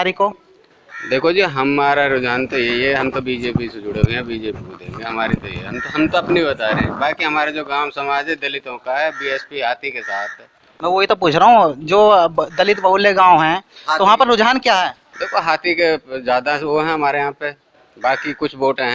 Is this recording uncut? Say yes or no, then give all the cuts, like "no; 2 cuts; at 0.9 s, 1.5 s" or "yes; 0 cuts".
yes; 0 cuts